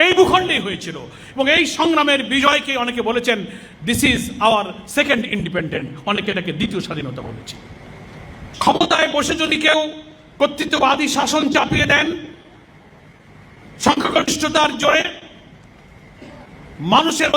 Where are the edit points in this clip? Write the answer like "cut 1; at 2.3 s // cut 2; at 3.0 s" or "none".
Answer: cut 1; at 8.5 s